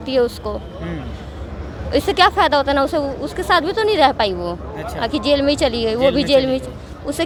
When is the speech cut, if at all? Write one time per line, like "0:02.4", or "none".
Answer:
none